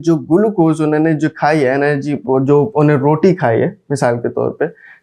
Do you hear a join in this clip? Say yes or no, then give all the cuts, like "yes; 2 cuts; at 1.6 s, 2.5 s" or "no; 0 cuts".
no; 0 cuts